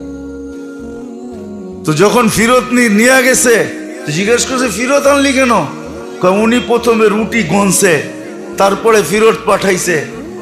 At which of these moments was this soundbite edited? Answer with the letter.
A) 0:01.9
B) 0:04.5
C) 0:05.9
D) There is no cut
A